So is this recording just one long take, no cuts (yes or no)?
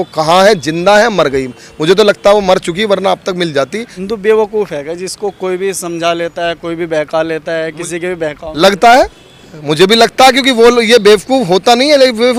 yes